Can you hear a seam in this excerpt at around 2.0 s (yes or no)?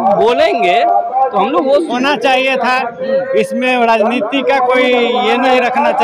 yes